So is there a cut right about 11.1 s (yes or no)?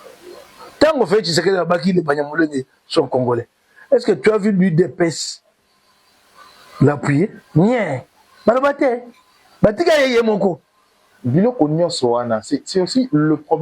yes